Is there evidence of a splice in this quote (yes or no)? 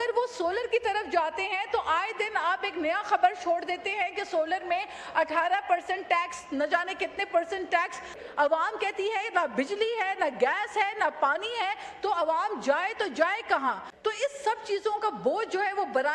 yes